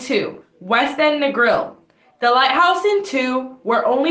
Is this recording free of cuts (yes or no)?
yes